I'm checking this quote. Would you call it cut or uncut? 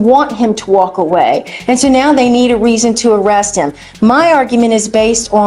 uncut